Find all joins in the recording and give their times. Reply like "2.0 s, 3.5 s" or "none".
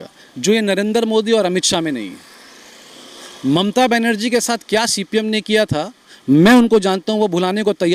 none